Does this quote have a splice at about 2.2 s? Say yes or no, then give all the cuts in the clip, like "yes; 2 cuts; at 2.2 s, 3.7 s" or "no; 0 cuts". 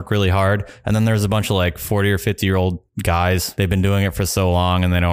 no; 1 cut; at 3.5 s